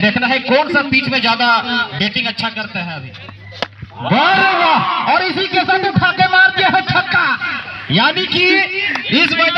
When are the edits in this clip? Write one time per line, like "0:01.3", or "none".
0:03.0